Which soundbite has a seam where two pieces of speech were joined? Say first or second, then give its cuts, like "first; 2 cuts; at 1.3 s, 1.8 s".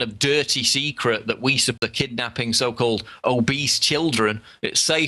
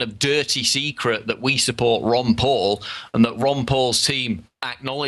second; 1 cut; at 1.8 s